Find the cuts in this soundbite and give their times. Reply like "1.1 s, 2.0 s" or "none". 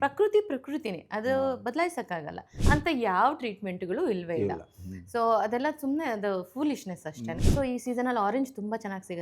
2.5 s, 7.4 s